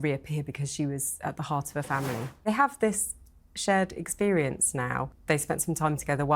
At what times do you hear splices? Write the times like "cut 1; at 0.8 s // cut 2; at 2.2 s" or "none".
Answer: cut 1; at 2.4 s // cut 2; at 5.1 s